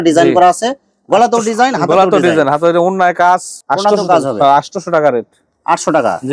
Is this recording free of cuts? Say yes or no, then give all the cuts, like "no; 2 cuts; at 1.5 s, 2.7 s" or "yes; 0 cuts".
yes; 0 cuts